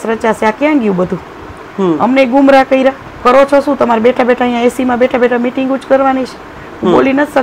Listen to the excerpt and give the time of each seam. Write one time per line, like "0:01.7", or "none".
0:03.1